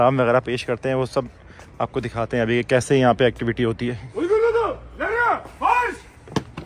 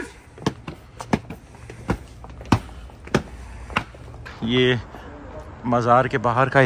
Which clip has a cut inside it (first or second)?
second